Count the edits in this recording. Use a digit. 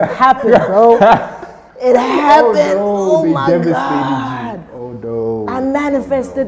0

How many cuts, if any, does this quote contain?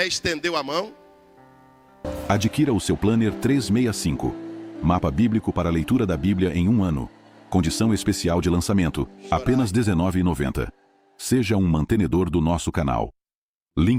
1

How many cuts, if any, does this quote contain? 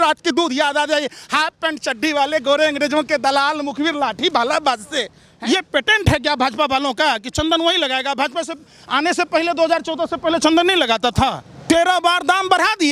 2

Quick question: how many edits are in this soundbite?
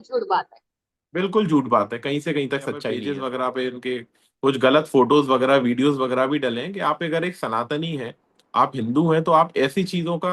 1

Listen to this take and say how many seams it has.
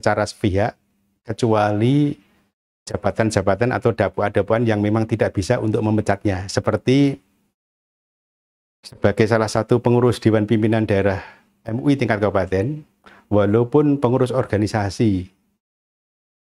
0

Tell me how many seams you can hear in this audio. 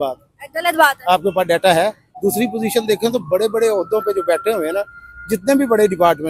1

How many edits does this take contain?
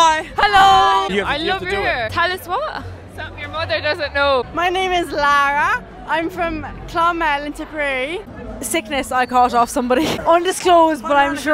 3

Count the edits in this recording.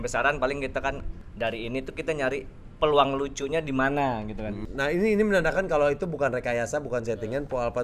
2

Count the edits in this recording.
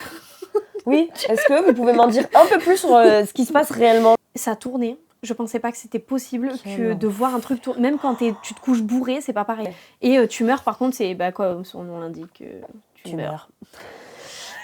2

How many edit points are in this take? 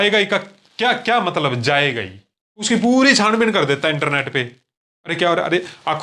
1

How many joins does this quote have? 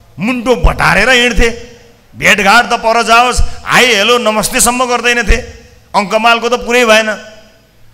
0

